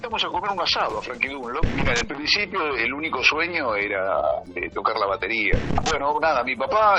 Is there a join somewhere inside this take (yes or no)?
yes